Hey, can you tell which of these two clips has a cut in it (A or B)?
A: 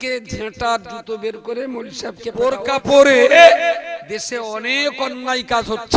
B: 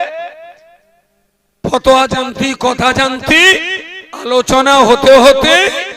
A